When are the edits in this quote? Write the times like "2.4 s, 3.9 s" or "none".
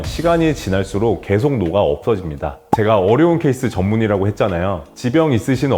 2.6 s